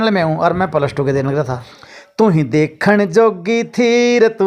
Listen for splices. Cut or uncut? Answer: cut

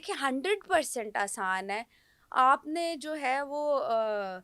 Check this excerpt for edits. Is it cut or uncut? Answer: uncut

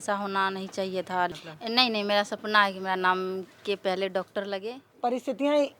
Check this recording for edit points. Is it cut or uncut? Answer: cut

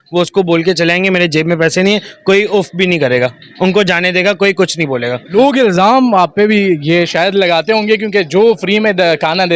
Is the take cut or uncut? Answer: cut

